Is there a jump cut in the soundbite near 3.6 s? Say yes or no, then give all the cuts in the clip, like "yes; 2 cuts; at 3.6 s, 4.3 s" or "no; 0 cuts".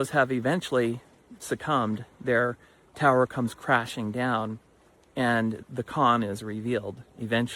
no; 0 cuts